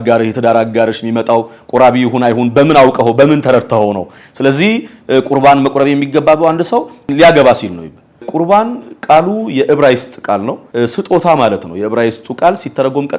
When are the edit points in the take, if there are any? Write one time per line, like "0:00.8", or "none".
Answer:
0:07.1
0:08.3
0:10.6

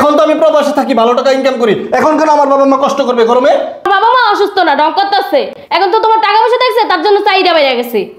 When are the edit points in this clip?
0:03.9

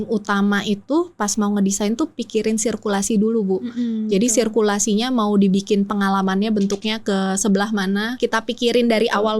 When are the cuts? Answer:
0:08.1

